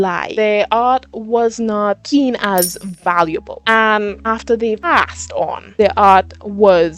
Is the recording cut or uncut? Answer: cut